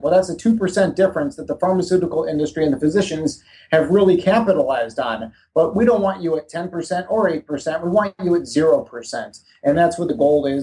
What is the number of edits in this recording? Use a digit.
0